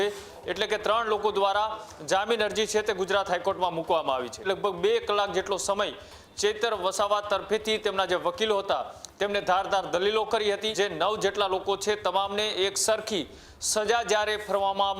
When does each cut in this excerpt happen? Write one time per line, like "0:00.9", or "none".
0:04.5
0:10.7